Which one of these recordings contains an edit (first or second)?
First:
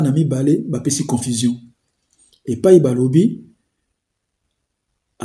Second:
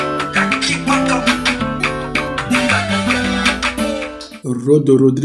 second